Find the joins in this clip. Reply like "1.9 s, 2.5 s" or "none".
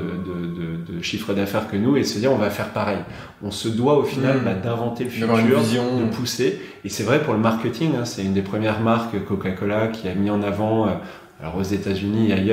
none